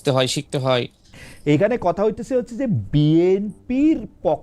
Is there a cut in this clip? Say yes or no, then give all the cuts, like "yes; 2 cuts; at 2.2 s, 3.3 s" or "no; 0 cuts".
yes; 1 cut; at 1.0 s